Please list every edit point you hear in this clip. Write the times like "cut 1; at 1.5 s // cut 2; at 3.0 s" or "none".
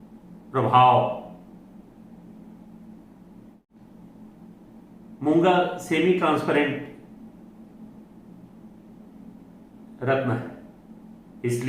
cut 1; at 3.7 s